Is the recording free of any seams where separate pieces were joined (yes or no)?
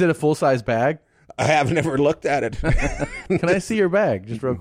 no